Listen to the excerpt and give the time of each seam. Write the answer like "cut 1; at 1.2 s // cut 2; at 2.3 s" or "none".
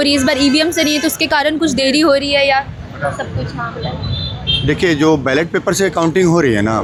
none